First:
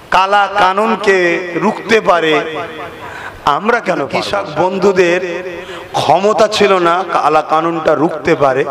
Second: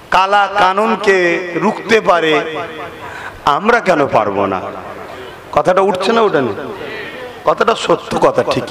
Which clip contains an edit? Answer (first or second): first